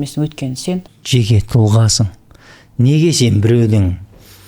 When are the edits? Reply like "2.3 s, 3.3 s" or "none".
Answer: 1.0 s

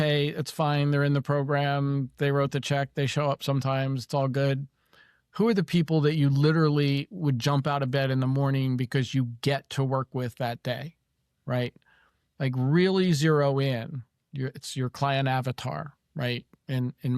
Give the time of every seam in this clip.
none

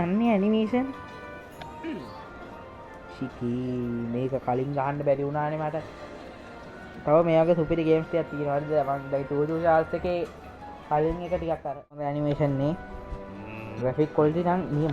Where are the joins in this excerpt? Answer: 12.2 s

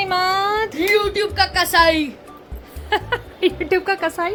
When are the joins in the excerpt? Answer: none

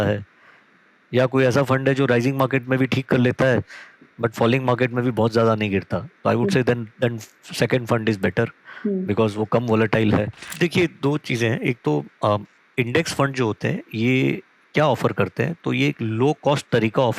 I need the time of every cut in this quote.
10.4 s

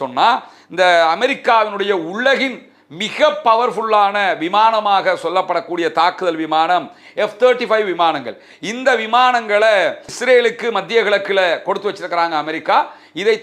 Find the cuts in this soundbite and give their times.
none

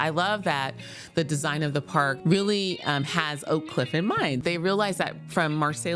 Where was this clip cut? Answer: 2.2 s, 4.4 s

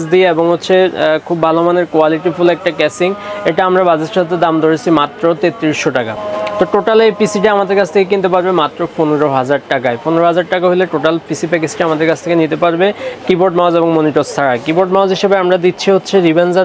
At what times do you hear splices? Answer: none

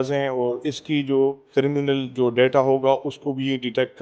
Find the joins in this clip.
1.4 s

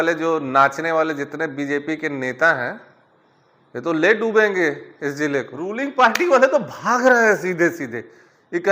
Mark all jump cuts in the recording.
5.7 s

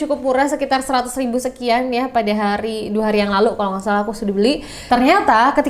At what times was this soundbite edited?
4.7 s

